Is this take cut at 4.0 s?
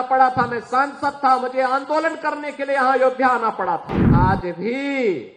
yes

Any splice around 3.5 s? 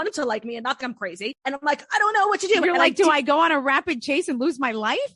no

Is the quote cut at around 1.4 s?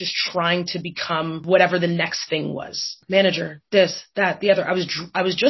yes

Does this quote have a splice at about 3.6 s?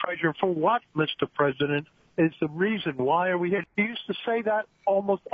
yes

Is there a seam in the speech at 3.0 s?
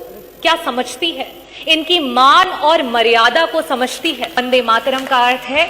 no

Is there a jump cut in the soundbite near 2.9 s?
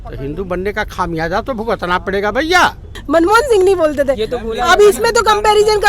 yes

